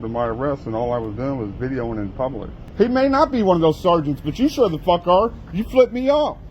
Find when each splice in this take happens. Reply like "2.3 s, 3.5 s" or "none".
2.6 s